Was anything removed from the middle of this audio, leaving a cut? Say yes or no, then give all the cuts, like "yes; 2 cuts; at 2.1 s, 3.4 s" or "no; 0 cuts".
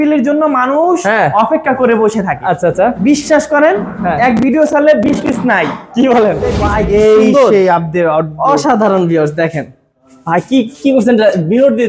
yes; 1 cut; at 6.6 s